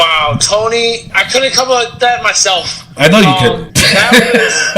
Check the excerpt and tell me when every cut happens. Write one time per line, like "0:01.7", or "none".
0:01.1
0:03.7